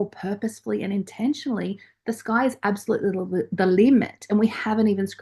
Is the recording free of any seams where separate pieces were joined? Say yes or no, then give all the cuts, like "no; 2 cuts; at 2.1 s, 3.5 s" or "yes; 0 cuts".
yes; 0 cuts